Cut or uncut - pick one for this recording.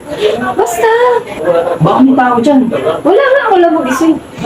cut